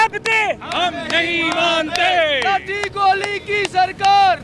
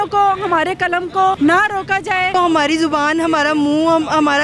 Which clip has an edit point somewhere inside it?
second; 2 cuts; at 1.4 s, 2.3 s

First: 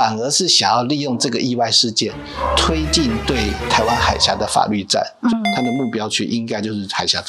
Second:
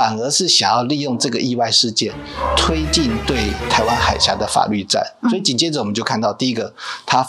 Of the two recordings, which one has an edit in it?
first; 1 cut; at 5.3 s

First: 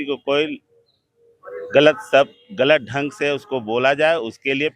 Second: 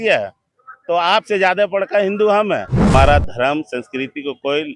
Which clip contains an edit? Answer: second; 1 cut; at 2.9 s

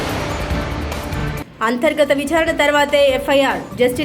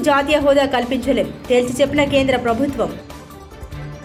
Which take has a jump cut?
first; 1 cut; at 1.3 s

